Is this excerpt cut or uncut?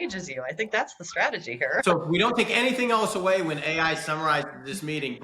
cut